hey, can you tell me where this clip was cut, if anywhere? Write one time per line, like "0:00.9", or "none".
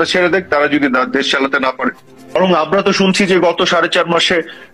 0:02.3

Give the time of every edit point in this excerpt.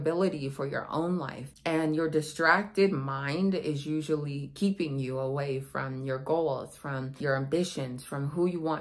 0:01.4
0:07.1

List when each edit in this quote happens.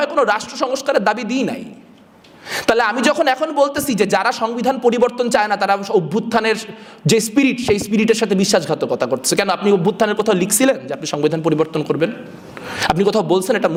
none

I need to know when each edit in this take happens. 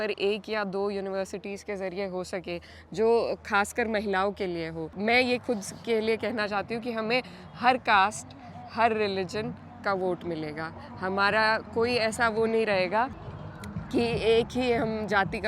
0:04.8

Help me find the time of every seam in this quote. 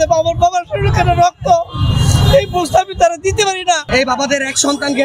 0:03.8

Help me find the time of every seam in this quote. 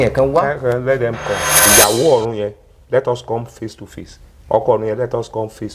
0:01.5

